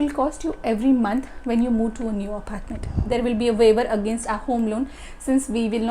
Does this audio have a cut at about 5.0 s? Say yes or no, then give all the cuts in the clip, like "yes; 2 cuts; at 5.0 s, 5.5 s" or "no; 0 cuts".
no; 1 cut; at 3.0 s